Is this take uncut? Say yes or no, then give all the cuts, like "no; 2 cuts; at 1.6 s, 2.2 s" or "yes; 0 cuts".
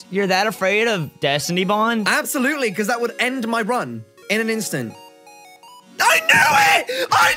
yes; 0 cuts